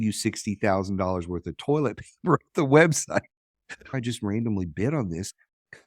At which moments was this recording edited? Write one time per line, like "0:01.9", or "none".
0:03.8